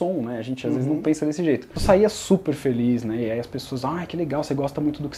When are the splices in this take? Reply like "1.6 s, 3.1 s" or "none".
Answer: 1.7 s